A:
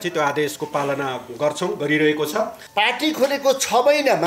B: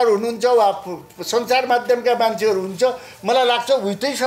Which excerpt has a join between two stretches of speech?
A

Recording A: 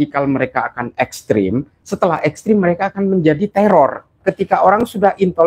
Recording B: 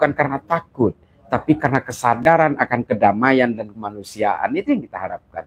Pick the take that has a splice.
A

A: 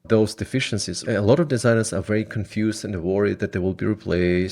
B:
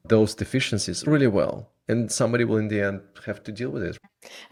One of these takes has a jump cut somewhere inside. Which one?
A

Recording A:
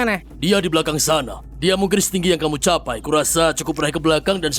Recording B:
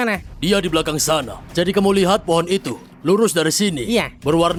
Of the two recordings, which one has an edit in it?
A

